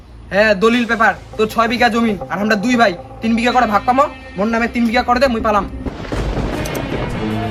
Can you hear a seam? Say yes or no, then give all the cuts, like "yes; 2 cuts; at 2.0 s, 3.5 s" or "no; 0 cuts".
no; 0 cuts